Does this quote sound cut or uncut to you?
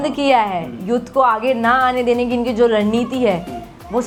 uncut